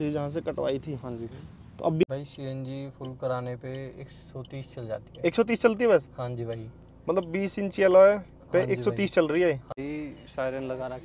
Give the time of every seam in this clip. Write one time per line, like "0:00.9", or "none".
0:02.0
0:09.8